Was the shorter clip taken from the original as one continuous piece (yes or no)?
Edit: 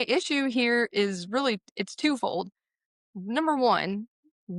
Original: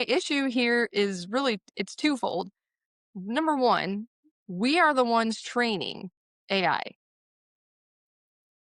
yes